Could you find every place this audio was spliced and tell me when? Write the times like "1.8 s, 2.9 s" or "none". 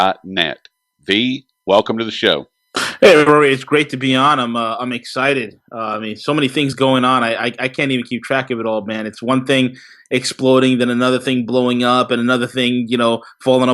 9.2 s